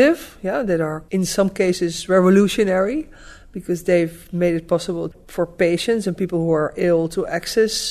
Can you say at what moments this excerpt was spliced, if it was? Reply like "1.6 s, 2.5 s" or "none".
1.0 s, 5.2 s